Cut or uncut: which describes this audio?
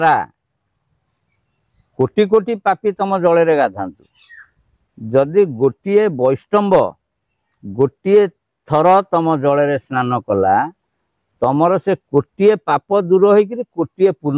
uncut